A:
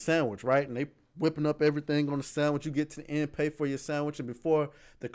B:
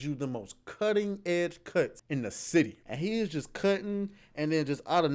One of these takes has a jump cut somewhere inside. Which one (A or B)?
B